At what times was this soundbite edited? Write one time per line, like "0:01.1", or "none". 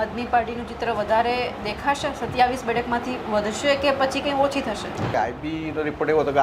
0:05.1